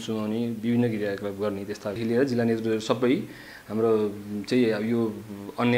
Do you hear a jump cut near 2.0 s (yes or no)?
yes